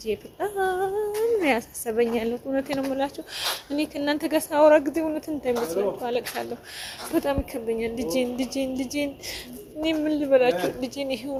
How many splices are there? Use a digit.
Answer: 0